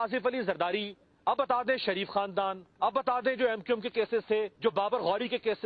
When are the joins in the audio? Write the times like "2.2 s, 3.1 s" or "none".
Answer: 1.4 s, 2.9 s, 4.5 s